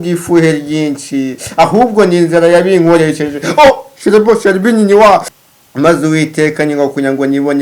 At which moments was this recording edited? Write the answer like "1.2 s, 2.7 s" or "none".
5.3 s